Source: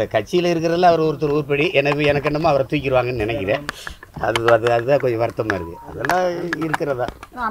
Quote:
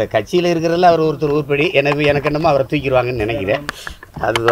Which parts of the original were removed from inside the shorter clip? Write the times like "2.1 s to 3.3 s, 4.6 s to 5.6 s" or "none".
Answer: none